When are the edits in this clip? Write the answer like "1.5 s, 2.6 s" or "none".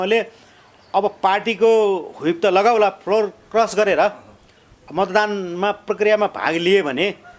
none